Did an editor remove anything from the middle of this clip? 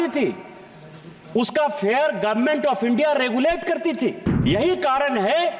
yes; 1 cut; at 4.3 s

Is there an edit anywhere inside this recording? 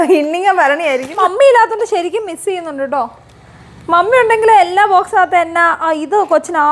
yes; 1 cut; at 1.2 s

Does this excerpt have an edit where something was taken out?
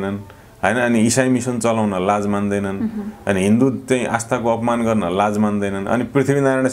no; 0 cuts

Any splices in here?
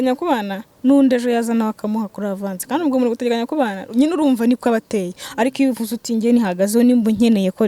no; 0 cuts

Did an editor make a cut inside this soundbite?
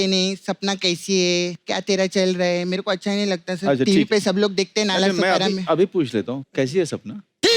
yes; 2 cuts; at 1.6 s, 6.4 s

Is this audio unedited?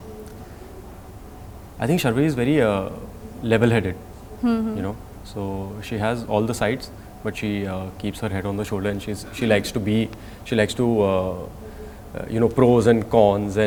yes; 0 cuts

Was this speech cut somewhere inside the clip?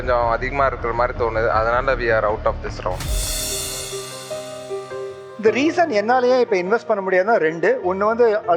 no; 0 cuts

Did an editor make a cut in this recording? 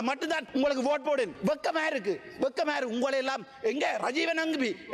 no; 0 cuts

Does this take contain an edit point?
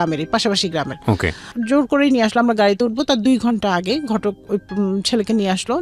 no; 0 cuts

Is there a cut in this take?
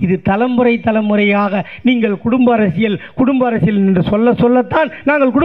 no; 0 cuts

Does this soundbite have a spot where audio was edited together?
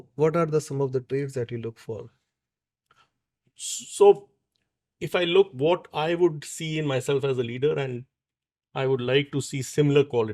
no; 0 cuts

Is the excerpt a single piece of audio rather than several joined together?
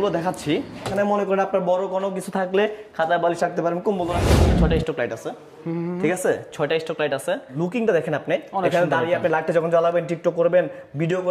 no; 3 cuts; at 0.9 s, 4.3 s, 7.5 s

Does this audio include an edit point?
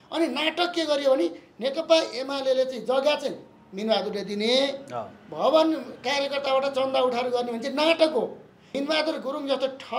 yes; 1 cut; at 8.6 s

